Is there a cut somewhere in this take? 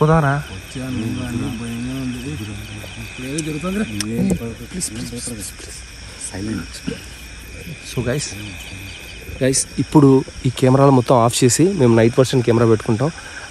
no; 0 cuts

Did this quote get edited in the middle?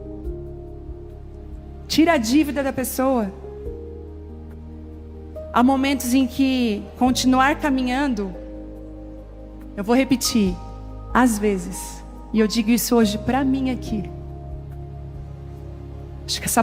yes; 4 cuts; at 3.7 s, 5.5 s, 8.3 s, 9.7 s

